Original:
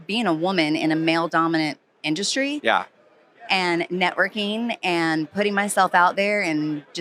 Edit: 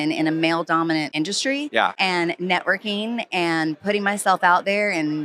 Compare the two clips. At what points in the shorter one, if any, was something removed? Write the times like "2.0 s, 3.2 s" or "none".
1.1 s, 1.9 s